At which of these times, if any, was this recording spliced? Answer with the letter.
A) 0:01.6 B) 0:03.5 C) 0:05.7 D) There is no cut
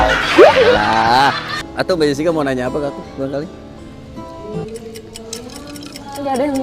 A